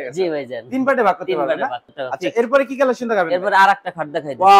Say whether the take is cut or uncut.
cut